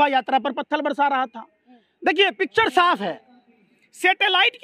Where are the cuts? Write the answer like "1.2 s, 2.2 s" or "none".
none